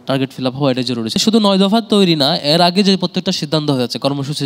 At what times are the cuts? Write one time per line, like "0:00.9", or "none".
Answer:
0:01.2